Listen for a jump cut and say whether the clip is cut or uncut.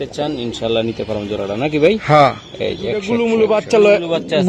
cut